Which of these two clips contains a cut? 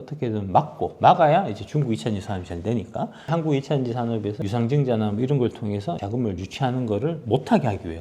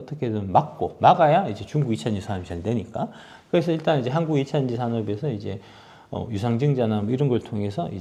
first; 3 cuts; at 3.3 s, 4.4 s, 6.0 s

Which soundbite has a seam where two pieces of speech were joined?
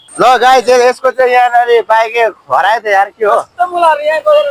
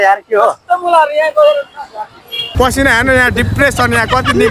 second; 1 cut; at 2.5 s

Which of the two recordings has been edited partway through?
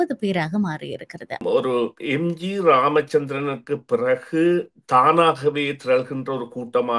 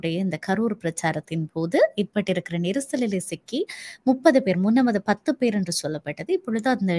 first; 1 cut; at 1.4 s

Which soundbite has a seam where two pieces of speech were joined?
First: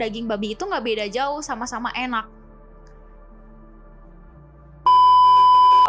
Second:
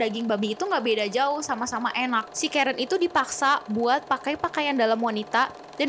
second; 1 cut; at 2.3 s

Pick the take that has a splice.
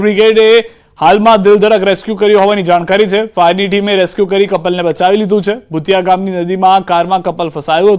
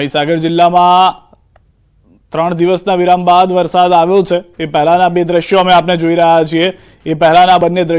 second; 1 cut; at 6.5 s

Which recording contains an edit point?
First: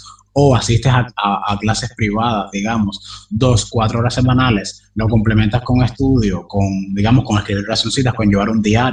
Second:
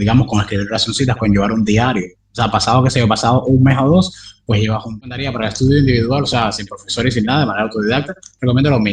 second; 1 cut; at 4.9 s

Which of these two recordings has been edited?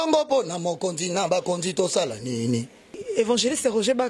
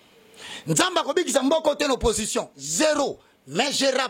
first; 1 cut; at 3.0 s

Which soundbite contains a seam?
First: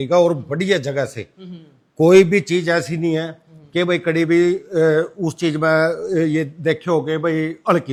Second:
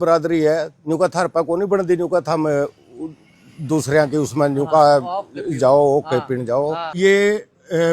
second; 1 cut; at 7.0 s

